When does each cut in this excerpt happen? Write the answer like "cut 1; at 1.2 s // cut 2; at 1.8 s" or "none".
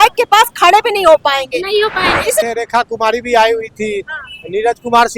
cut 1; at 2.4 s